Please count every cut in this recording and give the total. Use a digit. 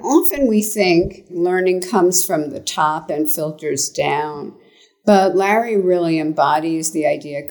1